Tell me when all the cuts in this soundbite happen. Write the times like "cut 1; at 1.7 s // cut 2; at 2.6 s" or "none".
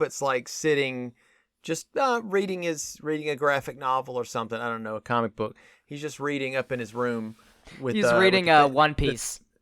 none